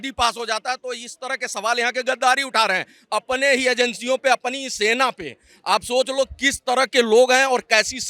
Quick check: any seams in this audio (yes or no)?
no